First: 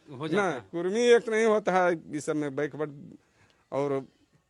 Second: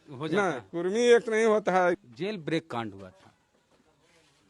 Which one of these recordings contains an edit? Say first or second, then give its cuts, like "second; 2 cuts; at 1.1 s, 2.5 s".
second; 1 cut; at 2.0 s